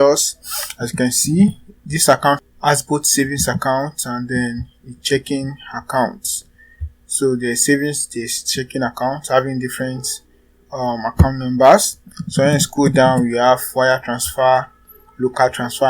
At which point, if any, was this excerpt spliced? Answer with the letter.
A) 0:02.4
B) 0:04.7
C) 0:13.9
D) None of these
A